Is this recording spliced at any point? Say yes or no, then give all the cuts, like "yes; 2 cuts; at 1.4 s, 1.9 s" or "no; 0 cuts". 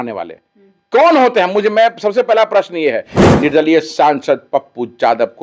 yes; 1 cut; at 3.1 s